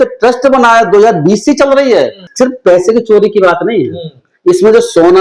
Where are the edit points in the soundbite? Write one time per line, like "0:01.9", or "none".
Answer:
0:02.2